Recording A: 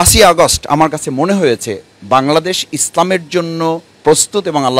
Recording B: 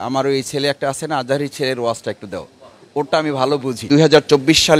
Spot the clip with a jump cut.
B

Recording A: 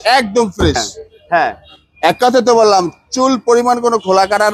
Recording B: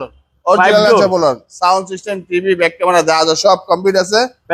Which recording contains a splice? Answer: A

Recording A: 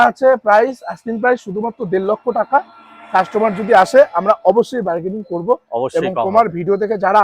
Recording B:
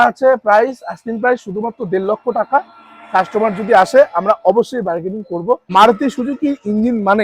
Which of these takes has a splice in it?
B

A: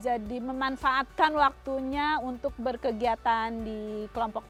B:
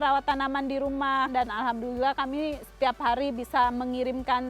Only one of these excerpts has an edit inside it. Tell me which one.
B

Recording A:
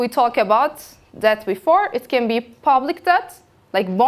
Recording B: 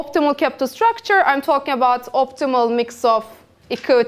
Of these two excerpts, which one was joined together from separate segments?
B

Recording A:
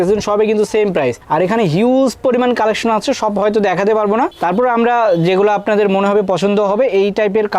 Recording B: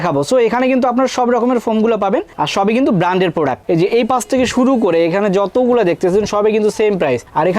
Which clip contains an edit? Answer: B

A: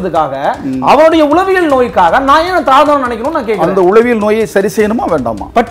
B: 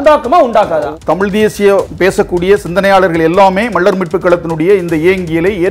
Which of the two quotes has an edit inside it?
B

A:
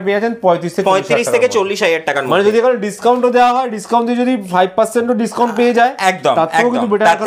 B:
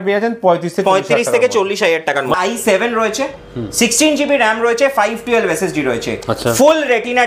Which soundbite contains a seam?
B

